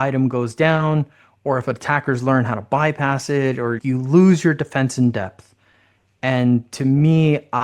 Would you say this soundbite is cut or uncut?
uncut